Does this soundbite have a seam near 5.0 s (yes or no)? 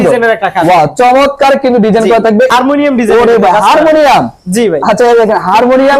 no